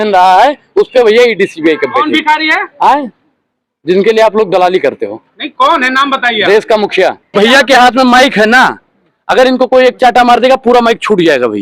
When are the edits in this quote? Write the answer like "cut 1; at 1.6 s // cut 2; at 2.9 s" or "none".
cut 1; at 7.3 s